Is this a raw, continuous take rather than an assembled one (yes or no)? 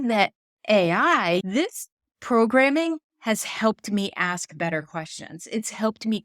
no